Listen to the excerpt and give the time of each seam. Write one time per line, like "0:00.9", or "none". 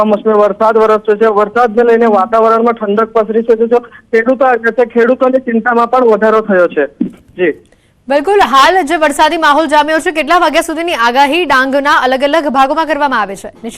none